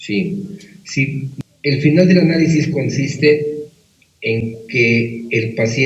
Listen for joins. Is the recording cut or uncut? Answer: cut